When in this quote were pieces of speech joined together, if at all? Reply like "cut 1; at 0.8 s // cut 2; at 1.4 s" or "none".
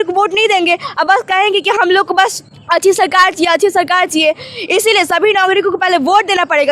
cut 1; at 2.5 s